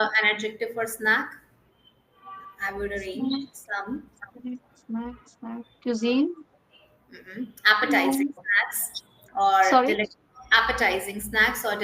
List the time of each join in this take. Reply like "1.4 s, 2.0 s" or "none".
none